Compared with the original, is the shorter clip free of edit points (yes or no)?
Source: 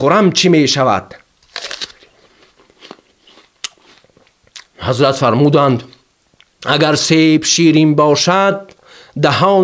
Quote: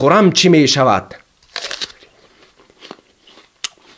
yes